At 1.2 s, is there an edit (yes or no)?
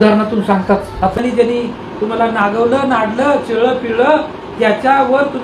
yes